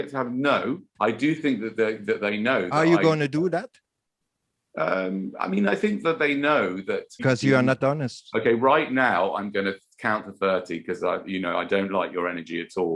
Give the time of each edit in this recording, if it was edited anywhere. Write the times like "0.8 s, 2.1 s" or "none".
0.9 s, 7.2 s